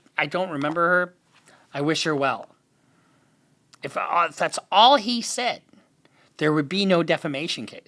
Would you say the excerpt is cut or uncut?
uncut